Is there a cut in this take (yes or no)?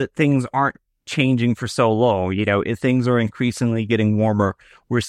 no